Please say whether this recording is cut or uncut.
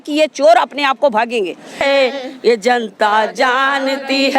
cut